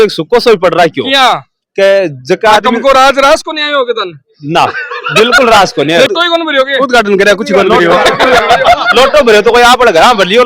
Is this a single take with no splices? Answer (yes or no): no